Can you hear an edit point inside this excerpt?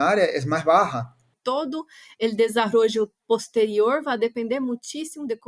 yes; 1 cut; at 1.3 s

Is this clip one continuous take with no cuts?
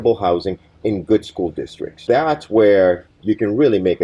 no; 2 cuts; at 1.9 s, 3.1 s

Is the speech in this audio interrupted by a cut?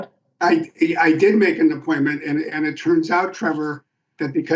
no; 0 cuts

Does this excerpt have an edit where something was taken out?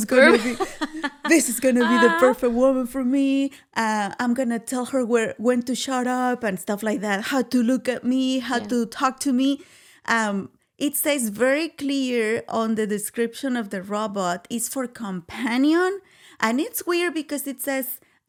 no; 0 cuts

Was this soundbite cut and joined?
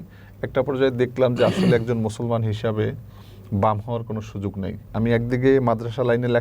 yes; 1 cut; at 4.9 s

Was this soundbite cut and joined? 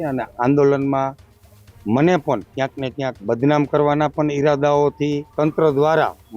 yes; 1 cut; at 5.3 s

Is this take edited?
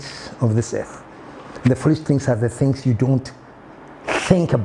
no; 0 cuts

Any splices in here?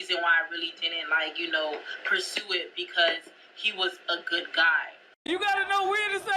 yes; 1 cut; at 5.0 s

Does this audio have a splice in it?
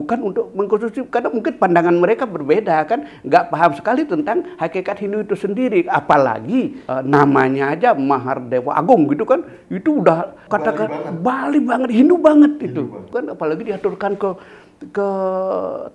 yes; 3 cuts; at 6.8 s, 10.4 s, 13.1 s

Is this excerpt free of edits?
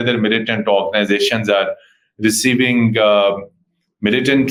yes; 0 cuts

